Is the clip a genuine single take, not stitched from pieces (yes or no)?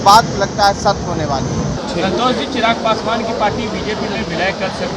no